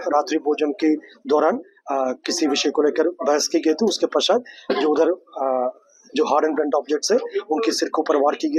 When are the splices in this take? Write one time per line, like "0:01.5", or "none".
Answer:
none